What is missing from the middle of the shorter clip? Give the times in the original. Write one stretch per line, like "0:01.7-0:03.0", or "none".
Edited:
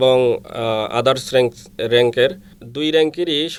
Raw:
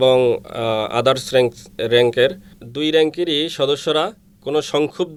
none